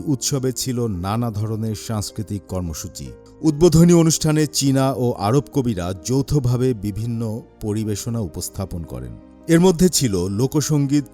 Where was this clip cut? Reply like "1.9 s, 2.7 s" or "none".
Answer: none